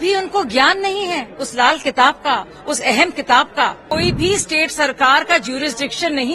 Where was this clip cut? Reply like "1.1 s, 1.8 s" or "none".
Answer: 3.8 s